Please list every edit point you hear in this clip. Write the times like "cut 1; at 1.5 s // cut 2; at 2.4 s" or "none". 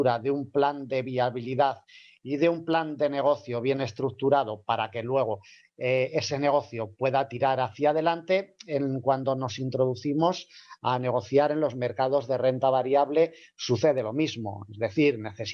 cut 1; at 8.3 s